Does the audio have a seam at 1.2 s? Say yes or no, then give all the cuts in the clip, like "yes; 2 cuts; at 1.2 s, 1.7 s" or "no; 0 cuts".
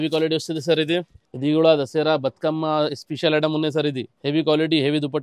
yes; 2 cuts; at 1.2 s, 4.1 s